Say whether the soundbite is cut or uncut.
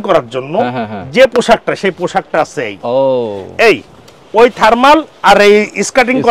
uncut